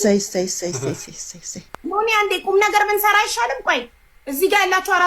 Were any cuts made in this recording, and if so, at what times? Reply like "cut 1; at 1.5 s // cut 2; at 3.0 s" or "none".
cut 1; at 1.7 s